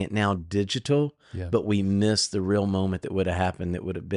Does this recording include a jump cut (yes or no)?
no